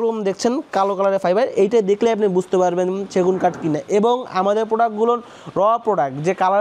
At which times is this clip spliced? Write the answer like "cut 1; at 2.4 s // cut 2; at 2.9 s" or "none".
none

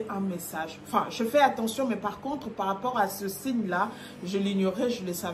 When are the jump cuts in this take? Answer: none

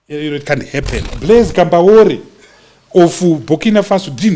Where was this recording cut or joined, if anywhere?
cut 1; at 1.1 s

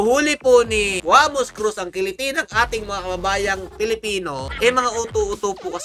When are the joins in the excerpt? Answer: cut 1; at 4.5 s

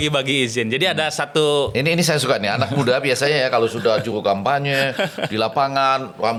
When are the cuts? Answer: none

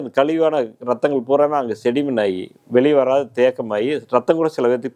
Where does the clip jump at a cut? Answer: none

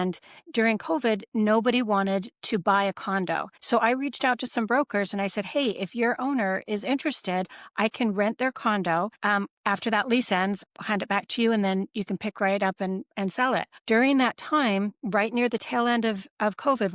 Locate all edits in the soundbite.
cut 1; at 3.5 s // cut 2; at 9.1 s // cut 3; at 13.7 s

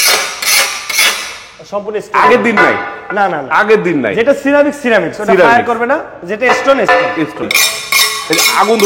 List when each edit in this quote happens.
cut 1; at 7.5 s

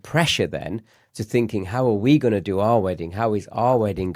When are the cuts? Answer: none

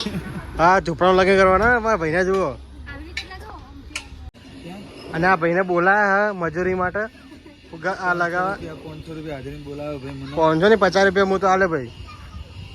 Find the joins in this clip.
cut 1; at 4.4 s

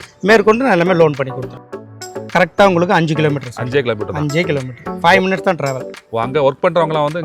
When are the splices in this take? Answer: cut 1; at 2.0 s

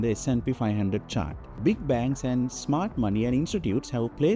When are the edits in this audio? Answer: cut 1; at 1.6 s

